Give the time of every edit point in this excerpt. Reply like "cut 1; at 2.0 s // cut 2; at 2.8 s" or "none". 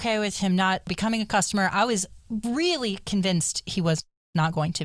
cut 1; at 0.9 s